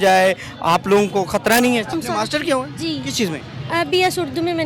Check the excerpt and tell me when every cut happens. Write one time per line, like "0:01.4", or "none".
0:02.0